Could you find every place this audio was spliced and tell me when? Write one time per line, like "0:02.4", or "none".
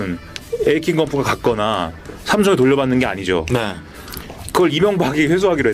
none